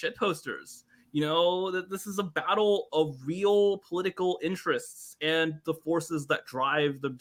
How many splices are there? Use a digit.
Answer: 0